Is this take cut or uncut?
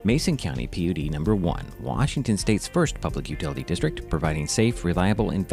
uncut